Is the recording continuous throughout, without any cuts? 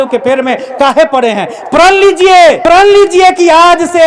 no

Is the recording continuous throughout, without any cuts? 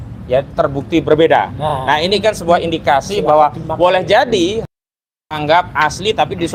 yes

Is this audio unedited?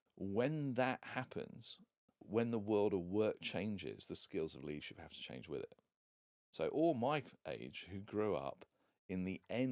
no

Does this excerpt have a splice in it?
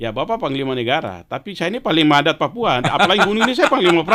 no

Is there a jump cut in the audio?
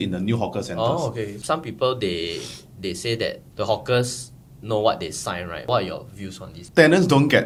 no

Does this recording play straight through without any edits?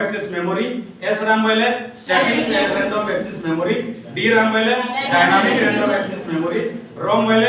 yes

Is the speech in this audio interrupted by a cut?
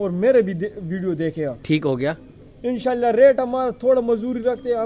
no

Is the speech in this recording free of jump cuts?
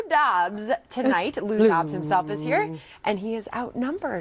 no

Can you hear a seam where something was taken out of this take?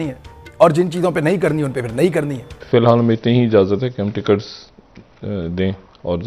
yes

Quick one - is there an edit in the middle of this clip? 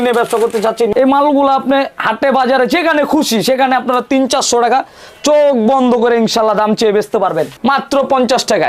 yes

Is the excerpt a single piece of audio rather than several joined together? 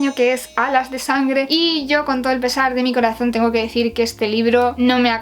yes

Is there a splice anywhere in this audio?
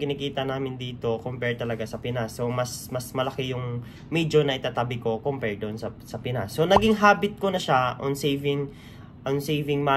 no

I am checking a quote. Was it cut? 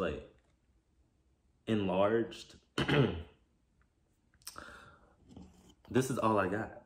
no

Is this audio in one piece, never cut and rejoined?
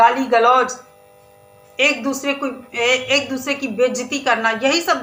yes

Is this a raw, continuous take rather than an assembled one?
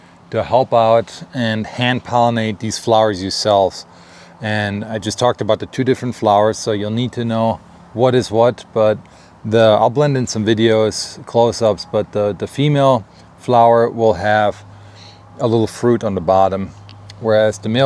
yes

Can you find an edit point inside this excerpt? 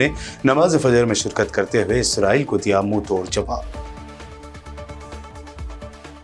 no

